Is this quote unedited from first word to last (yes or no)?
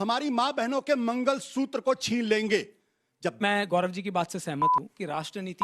no